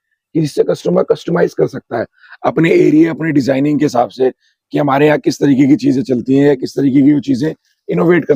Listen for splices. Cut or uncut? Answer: uncut